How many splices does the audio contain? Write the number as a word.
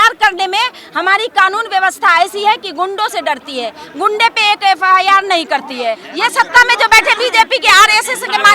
one